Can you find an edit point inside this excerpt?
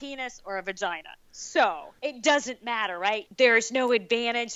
yes; 2 cuts; at 1.9 s, 3.3 s

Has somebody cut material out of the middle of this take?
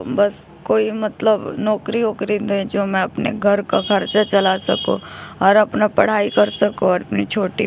no; 0 cuts

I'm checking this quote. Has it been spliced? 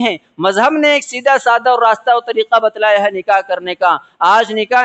no; 0 cuts

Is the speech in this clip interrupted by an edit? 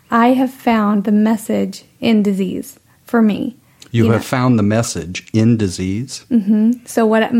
no; 0 cuts

